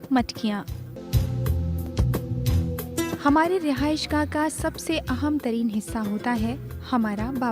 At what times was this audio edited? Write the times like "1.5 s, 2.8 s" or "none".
1.0 s